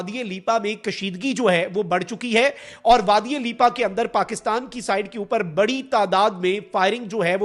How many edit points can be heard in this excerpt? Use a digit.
0